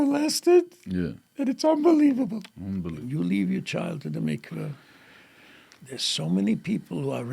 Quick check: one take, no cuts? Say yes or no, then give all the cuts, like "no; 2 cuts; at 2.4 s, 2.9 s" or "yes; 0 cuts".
no; 1 cut; at 2.9 s